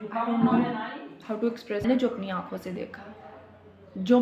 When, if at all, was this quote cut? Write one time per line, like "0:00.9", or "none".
0:01.8